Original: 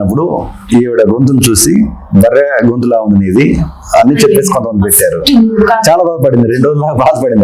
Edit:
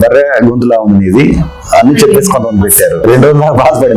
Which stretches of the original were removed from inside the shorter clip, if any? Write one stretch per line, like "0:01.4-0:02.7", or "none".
0:05.3-0:06.5